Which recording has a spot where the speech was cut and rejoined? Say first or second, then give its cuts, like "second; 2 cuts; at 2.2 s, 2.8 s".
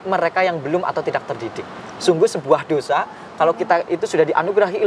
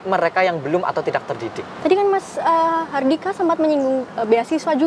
second; 1 cut; at 1.7 s